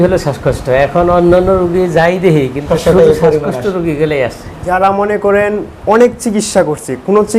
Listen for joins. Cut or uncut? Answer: cut